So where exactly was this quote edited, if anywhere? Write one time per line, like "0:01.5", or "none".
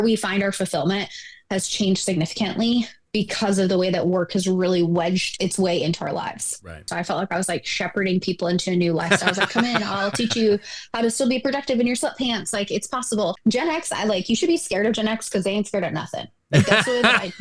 0:05.4
0:06.9
0:13.4

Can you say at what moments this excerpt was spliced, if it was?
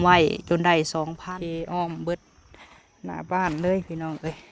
0:01.1

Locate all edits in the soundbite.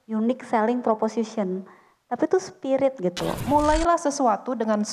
0:03.4

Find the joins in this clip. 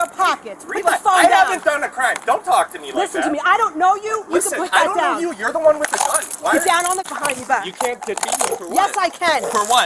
0:07.0

